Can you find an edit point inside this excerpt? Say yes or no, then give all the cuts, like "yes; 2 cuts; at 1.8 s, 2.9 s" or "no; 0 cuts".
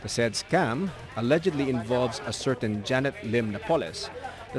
no; 0 cuts